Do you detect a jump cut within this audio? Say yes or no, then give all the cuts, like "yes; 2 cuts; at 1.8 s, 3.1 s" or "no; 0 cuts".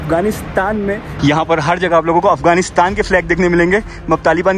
yes; 1 cut; at 1.1 s